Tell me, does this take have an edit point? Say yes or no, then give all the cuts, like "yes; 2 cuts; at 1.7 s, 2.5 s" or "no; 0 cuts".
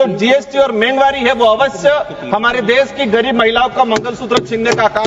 no; 0 cuts